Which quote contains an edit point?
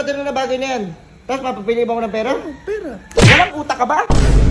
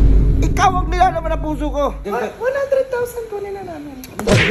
second; 1 cut; at 2.0 s

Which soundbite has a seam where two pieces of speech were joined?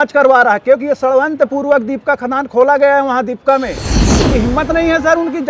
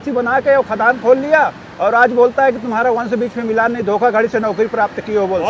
first; 1 cut; at 4.0 s

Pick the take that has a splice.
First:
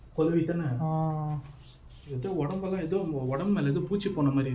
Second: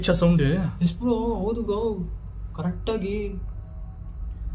second; 1 cut; at 3.4 s

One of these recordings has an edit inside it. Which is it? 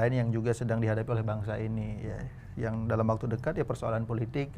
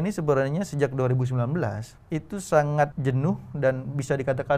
second; 2 cuts; at 1.9 s, 3.0 s

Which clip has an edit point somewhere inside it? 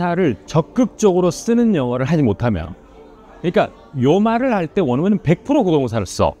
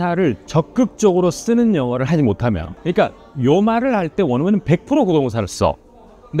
second; 1 cut; at 2.7 s

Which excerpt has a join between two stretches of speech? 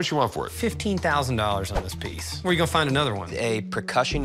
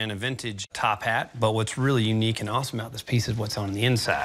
first; 1 cut; at 3.3 s

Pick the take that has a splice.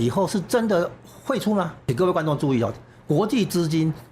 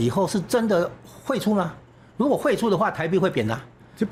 first; 1 cut; at 1.8 s

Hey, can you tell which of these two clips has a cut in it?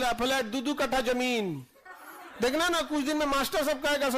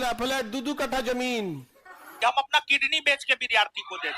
second; 1 cut; at 2.1 s

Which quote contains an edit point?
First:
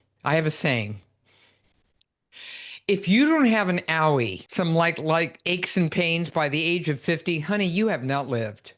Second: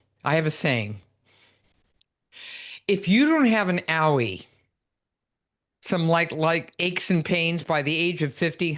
first; 1 cut; at 4.4 s

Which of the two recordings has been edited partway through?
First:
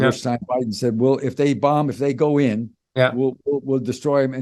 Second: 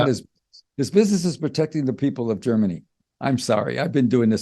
second; 1 cut; at 2.8 s

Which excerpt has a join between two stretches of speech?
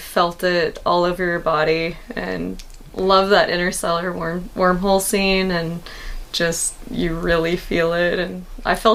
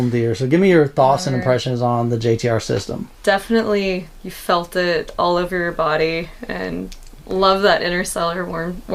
second; 1 cut; at 3.1 s

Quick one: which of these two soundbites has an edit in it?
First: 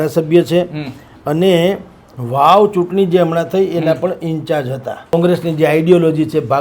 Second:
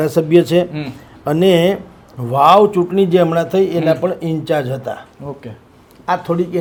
first; 1 cut; at 5.1 s

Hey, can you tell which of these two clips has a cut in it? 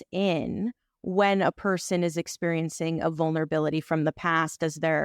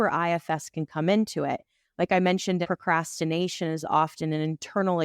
second; 1 cut; at 2.6 s

